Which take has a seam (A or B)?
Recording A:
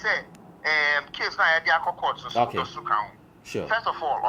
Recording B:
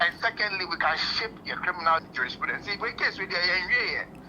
B